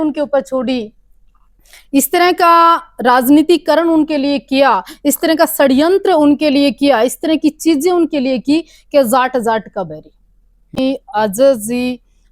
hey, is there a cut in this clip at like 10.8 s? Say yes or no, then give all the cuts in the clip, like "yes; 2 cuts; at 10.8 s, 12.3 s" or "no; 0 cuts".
yes; 1 cut; at 10.8 s